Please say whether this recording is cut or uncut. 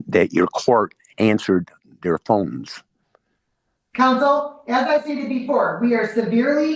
uncut